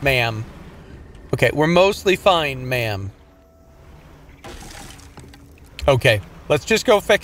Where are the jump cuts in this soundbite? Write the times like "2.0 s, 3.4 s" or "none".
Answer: 3.2 s